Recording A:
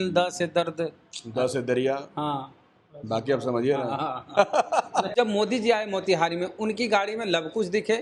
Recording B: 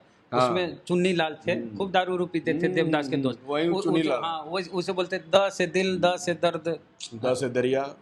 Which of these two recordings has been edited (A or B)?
A